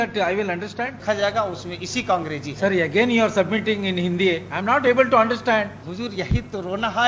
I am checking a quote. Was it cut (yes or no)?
yes